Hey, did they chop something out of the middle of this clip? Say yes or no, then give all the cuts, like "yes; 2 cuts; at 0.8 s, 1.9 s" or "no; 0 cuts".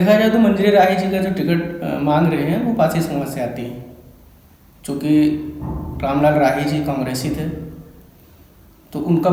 no; 0 cuts